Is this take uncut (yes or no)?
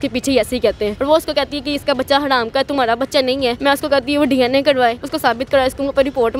no